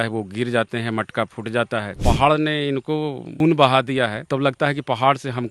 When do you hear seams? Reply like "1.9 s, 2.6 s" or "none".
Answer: 1.9 s, 3.3 s, 4.2 s